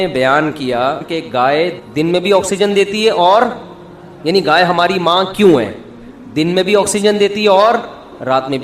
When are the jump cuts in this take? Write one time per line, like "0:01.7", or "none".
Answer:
0:01.5